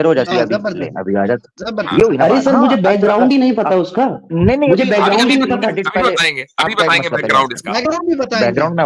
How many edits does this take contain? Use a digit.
0